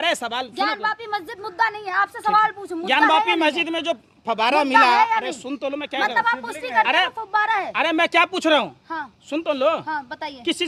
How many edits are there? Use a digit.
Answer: 0